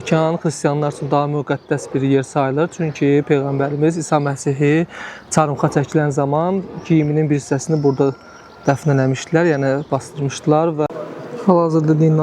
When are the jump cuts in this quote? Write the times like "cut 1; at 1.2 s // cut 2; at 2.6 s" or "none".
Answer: cut 1; at 10.9 s